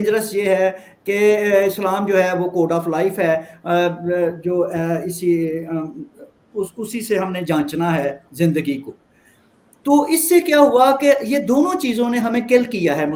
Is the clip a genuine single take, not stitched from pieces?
yes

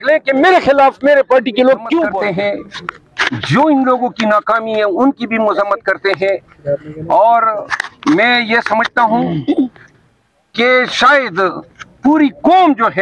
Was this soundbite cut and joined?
yes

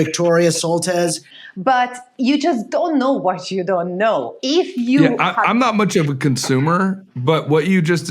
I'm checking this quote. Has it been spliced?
yes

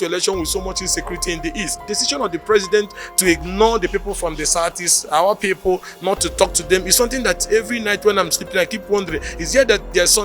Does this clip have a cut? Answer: yes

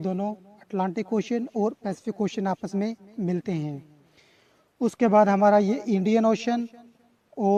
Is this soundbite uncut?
yes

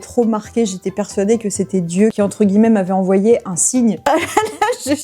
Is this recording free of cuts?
no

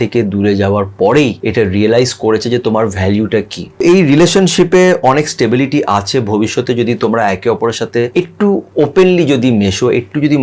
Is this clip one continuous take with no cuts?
no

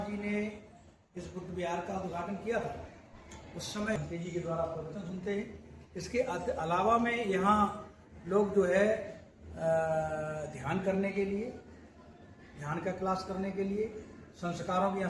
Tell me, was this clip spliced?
yes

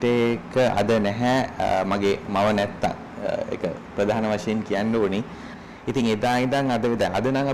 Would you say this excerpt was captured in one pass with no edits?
no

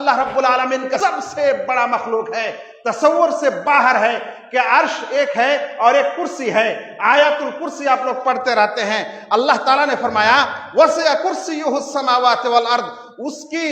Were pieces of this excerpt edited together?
yes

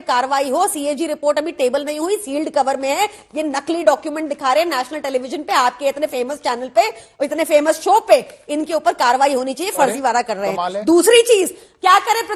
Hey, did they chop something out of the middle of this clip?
no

